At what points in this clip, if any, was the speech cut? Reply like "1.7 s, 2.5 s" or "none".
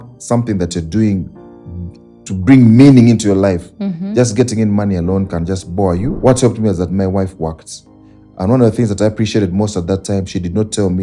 6.1 s